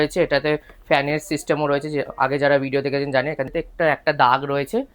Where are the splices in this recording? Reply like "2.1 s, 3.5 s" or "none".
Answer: 3.5 s